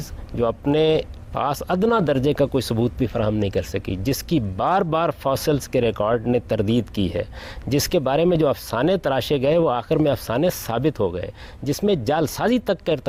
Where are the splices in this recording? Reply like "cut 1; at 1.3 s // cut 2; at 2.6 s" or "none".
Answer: none